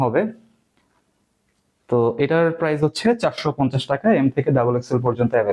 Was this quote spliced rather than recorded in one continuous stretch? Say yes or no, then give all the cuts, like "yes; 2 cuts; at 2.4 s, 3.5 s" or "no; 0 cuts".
no; 0 cuts